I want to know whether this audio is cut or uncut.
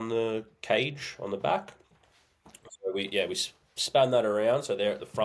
uncut